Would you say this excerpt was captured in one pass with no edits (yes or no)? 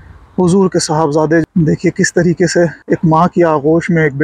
no